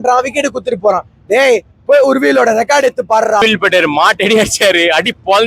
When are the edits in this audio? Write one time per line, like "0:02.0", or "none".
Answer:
0:03.4